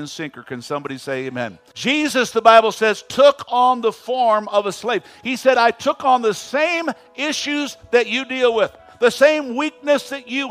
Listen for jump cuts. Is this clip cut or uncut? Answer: cut